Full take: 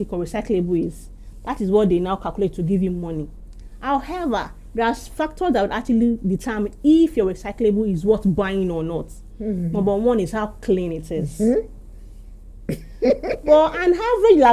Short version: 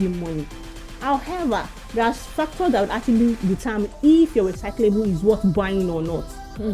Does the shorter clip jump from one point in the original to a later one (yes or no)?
no